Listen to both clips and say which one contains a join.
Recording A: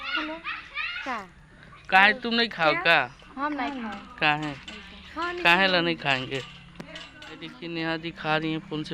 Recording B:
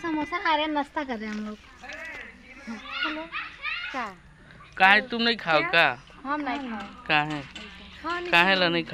A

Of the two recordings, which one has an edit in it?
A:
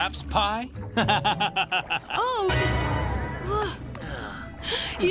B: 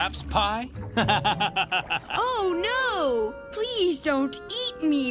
B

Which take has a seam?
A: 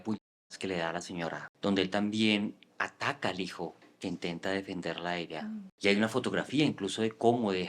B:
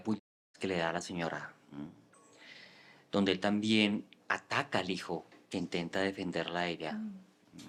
A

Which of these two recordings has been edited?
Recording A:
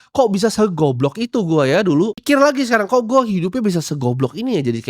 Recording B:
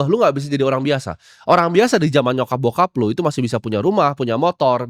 A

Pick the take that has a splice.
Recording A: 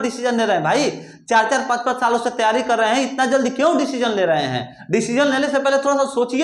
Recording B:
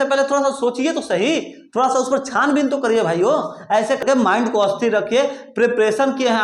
B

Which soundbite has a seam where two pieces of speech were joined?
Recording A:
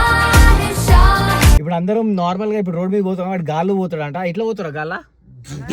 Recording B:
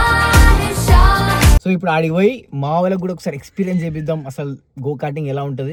A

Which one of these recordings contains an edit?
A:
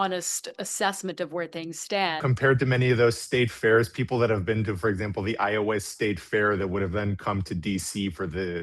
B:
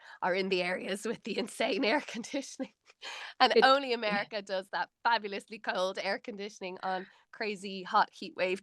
A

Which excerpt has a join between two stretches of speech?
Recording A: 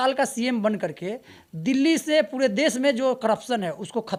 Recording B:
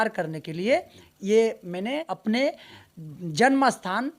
B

